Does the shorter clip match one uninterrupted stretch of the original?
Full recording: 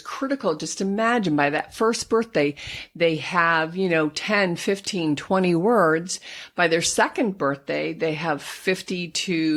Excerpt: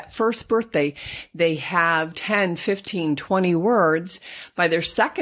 no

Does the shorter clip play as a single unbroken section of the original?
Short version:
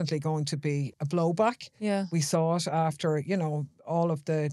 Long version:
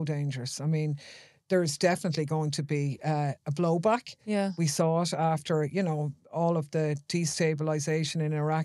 no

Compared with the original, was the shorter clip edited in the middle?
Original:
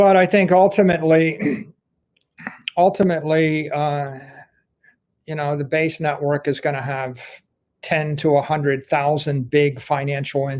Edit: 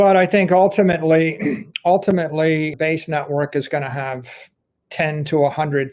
yes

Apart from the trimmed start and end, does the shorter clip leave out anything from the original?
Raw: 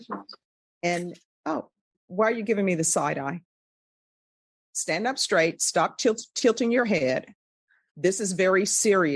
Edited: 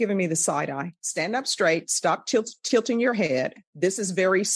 yes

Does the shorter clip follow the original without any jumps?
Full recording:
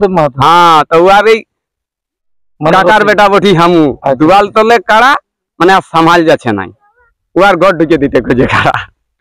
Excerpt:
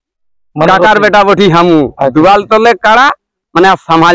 yes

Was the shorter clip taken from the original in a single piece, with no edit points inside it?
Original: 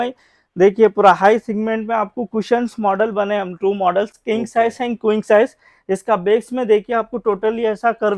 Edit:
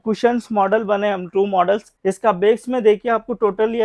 no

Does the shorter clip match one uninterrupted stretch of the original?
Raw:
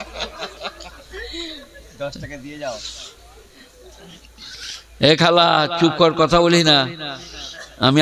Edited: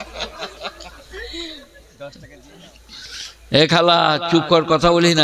no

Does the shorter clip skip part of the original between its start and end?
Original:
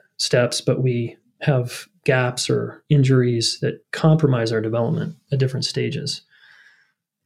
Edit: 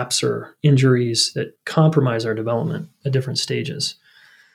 no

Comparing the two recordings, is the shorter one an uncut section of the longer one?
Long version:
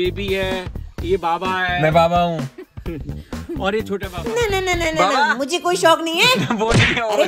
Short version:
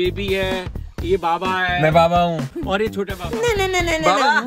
no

